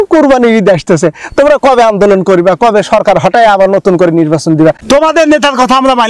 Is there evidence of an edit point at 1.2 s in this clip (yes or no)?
no